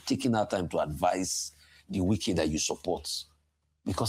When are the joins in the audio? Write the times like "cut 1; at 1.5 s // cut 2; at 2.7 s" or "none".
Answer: none